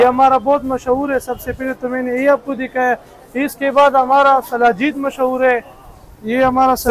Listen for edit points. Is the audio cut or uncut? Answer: uncut